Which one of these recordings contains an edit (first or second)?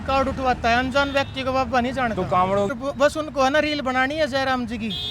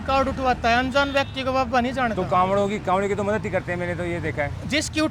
first